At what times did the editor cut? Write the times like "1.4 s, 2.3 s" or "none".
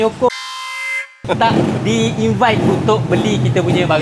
none